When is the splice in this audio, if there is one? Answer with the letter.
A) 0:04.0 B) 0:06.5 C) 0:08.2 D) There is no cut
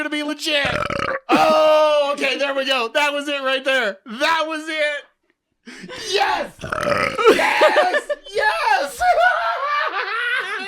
D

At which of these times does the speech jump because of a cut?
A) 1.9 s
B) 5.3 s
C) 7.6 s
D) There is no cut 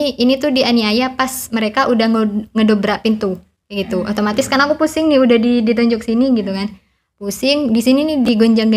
D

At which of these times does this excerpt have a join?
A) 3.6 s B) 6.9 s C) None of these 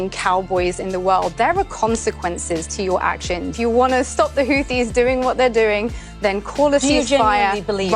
A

